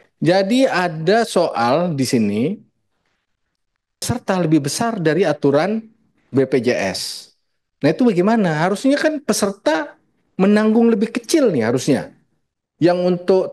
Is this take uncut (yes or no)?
no